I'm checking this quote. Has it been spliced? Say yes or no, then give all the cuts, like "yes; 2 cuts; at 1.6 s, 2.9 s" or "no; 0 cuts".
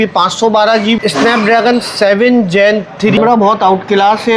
yes; 2 cuts; at 1.0 s, 3.2 s